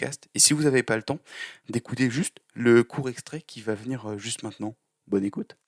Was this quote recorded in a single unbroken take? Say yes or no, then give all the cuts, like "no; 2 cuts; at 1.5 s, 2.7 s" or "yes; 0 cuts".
yes; 0 cuts